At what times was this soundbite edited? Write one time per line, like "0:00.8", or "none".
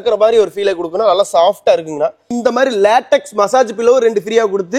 0:02.3